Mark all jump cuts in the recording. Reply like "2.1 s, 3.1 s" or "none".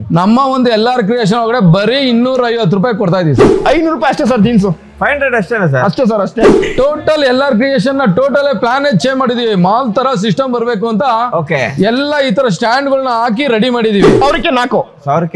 3.5 s, 6.6 s, 14.1 s